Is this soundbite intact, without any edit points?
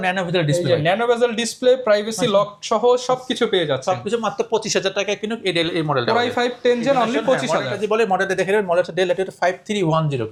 yes; 0 cuts

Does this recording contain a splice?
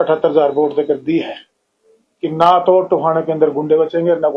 no; 0 cuts

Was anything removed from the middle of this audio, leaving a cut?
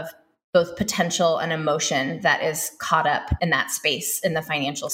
yes; 1 cut; at 3.3 s

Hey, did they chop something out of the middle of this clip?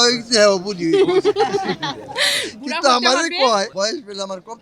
yes; 1 cut; at 3.7 s

